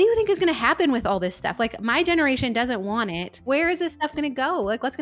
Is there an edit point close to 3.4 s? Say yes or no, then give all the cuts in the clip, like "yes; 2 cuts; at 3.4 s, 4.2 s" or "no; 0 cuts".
yes; 1 cut; at 3.4 s